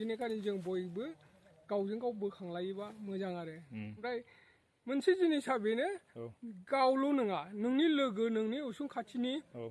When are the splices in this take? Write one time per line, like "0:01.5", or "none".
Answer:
0:04.0